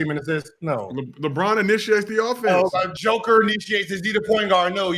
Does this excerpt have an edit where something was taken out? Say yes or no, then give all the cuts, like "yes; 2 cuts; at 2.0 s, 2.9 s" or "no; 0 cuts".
no; 0 cuts